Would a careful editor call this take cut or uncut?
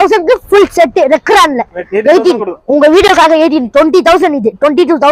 cut